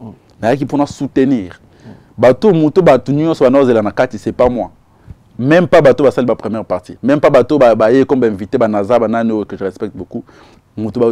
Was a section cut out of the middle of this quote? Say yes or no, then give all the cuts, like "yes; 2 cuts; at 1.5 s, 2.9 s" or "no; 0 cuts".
no; 0 cuts